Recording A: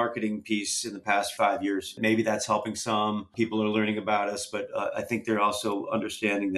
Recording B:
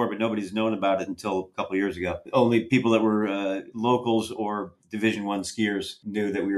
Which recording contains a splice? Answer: A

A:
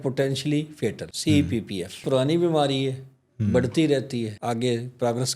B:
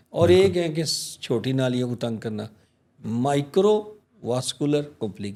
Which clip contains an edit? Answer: A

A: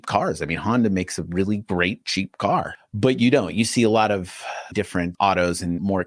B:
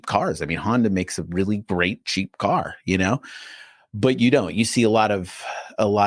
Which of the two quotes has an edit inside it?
A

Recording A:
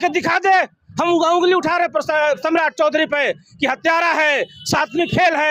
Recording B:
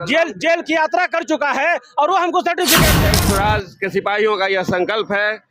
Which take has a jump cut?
B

